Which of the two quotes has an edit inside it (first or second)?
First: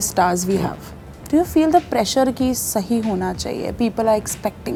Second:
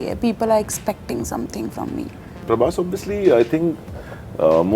second